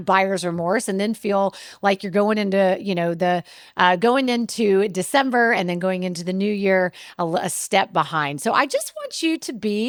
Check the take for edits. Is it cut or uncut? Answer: uncut